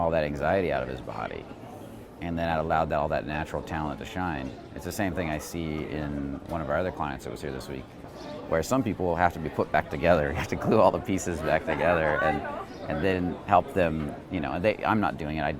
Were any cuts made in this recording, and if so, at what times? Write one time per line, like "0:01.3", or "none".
0:07.9